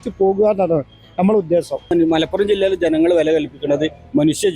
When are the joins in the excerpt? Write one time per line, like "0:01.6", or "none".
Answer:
0:01.9